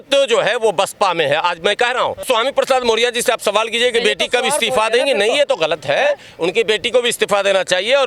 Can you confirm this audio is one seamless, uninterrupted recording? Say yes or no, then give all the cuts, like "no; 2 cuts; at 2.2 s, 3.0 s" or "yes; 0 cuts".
no; 1 cut; at 2.2 s